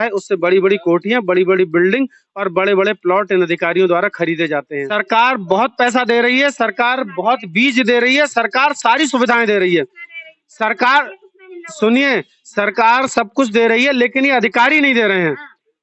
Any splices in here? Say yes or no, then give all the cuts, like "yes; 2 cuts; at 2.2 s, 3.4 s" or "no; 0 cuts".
yes; 1 cut; at 4.8 s